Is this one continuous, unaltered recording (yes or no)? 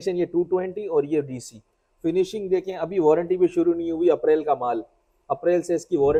yes